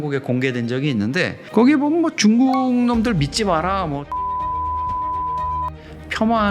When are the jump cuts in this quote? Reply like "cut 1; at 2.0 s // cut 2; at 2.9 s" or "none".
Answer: cut 1; at 1.4 s